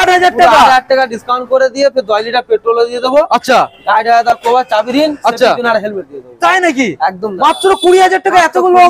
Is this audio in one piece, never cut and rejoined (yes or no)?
yes